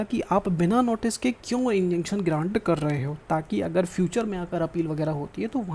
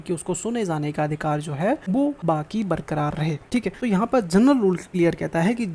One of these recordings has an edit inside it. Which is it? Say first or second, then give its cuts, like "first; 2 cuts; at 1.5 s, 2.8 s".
second; 3 cuts; at 2.1 s, 3.7 s, 4.9 s